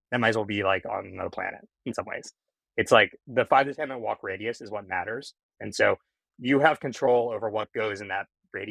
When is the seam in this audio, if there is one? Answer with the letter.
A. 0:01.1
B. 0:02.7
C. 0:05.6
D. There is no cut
C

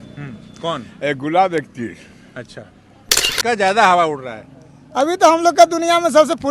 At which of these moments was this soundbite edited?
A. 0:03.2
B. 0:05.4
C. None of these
A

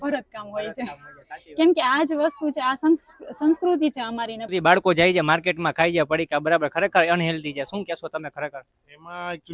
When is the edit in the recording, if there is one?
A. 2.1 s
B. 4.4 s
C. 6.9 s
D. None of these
B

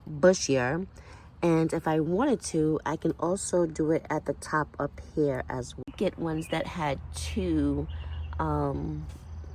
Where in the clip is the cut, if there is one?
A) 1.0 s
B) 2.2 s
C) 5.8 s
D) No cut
C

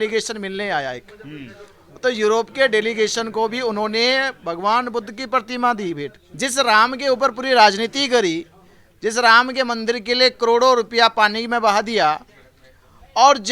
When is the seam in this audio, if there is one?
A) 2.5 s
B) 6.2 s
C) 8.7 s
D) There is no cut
B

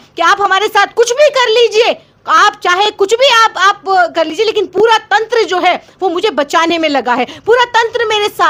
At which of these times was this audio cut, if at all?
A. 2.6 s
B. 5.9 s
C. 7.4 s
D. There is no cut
D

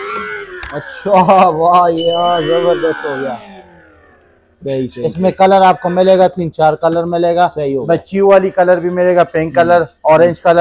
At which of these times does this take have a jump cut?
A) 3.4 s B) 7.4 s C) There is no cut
C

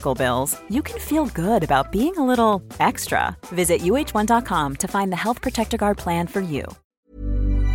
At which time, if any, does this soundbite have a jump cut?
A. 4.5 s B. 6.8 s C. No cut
B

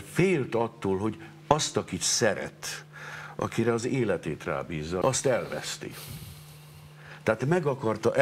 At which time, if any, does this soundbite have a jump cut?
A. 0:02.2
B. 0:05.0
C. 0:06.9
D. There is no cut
B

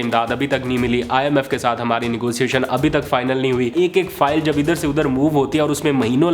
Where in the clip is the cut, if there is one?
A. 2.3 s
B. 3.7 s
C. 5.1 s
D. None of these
B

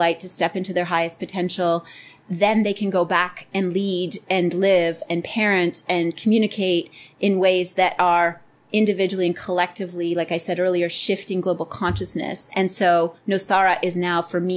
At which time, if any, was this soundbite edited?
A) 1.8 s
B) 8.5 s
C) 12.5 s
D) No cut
D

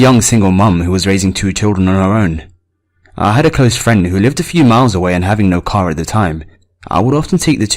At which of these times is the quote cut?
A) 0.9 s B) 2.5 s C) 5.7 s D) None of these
C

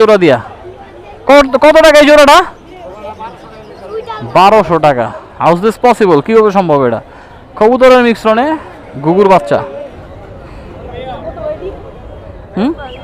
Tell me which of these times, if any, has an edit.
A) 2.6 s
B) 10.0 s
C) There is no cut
B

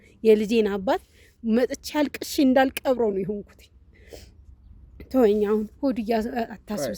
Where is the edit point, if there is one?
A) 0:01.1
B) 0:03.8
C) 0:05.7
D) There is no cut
D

